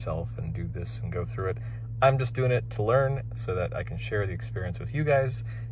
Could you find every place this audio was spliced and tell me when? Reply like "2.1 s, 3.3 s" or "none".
none